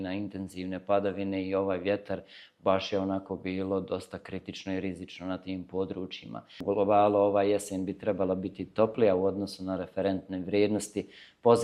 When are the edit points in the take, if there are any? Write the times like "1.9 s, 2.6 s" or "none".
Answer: 6.6 s